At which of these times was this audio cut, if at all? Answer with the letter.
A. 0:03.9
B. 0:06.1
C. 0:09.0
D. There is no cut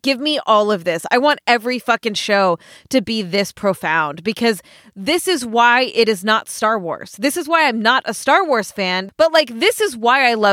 C